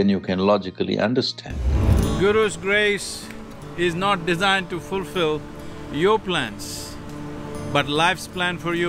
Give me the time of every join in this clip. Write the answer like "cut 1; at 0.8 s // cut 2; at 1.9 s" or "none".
cut 1; at 1.9 s